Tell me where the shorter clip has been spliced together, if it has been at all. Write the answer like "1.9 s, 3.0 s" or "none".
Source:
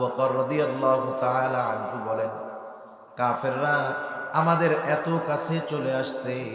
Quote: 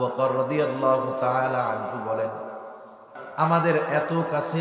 3.1 s